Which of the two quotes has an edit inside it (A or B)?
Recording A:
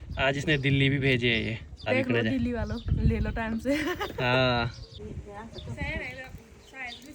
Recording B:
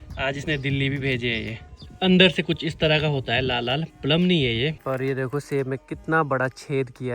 B